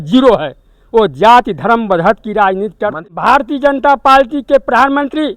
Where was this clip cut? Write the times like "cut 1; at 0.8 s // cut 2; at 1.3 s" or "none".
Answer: cut 1; at 3.0 s